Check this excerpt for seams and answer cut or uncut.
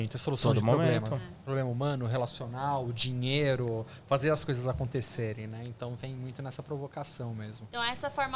uncut